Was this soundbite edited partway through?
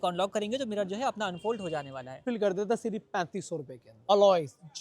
yes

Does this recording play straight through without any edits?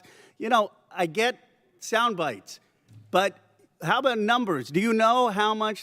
yes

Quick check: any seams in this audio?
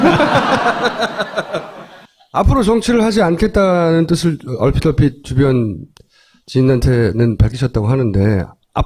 no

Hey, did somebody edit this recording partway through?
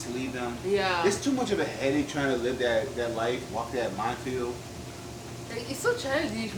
no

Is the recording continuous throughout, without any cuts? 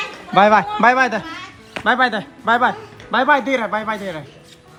yes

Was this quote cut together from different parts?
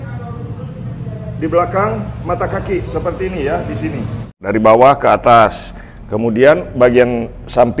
yes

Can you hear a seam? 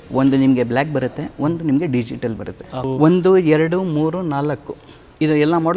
yes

